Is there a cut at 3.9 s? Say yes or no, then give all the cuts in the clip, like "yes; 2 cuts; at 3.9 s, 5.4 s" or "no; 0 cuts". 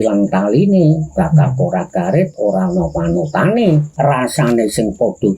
yes; 1 cut; at 3.9 s